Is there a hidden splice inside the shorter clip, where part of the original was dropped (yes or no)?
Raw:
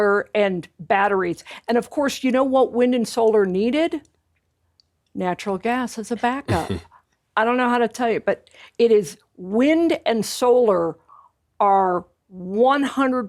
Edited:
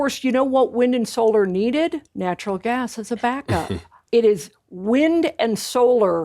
yes